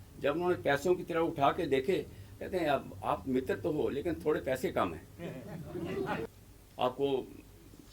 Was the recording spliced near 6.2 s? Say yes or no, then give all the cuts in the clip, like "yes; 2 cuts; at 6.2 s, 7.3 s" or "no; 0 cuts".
yes; 1 cut; at 6.2 s